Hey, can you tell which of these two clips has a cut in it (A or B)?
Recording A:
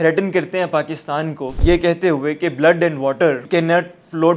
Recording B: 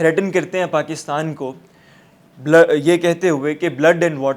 A